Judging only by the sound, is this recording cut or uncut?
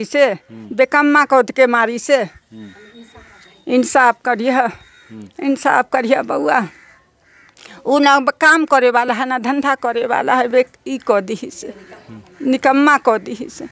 uncut